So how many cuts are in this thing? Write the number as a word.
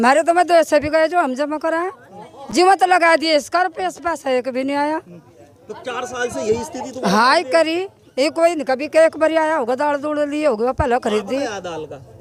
zero